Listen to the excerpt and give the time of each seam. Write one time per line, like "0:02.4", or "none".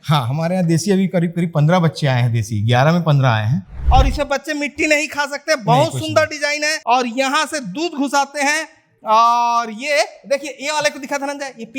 0:03.7
0:06.8